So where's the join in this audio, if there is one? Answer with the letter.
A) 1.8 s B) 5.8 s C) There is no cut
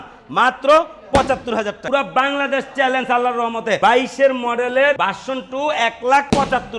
A